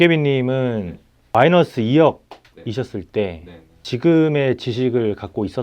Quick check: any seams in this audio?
no; 0 cuts

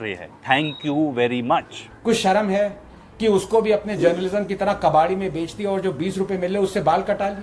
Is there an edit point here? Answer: no; 0 cuts

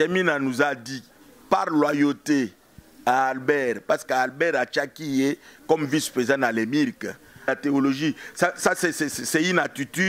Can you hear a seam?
yes; 1 cut; at 7.5 s

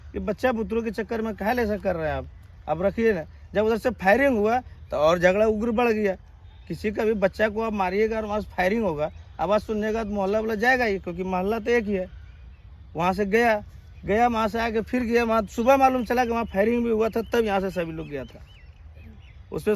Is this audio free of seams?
yes; 0 cuts

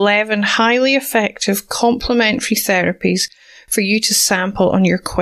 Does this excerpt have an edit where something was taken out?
no; 0 cuts

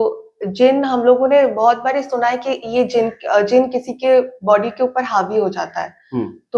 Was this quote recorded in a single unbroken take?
yes; 0 cuts

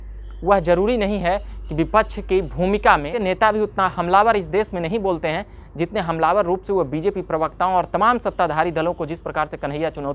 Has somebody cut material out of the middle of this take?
yes; 1 cut; at 3.1 s

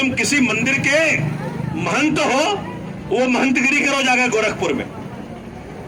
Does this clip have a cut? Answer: no; 0 cuts

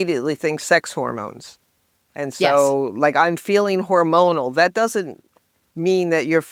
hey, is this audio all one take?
yes; 0 cuts

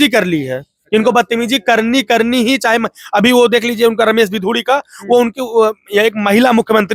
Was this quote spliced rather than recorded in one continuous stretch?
no; 0 cuts

